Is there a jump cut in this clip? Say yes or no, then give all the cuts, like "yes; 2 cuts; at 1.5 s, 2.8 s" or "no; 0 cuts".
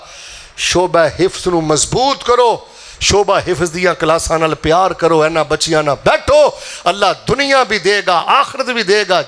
no; 0 cuts